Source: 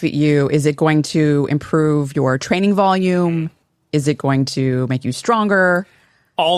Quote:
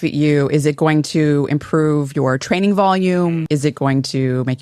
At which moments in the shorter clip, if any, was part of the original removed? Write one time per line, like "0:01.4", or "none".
0:03.4